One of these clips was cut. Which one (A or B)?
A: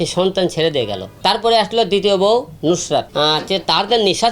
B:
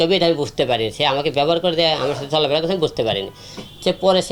A